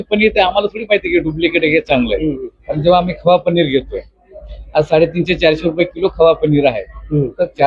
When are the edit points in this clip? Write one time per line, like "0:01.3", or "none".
none